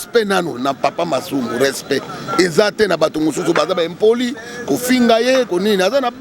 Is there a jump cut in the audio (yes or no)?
no